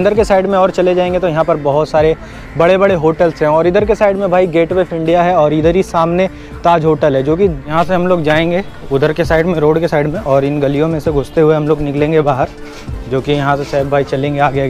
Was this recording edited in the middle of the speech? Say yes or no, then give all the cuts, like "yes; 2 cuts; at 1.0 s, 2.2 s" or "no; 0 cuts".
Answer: yes; 1 cut; at 7.7 s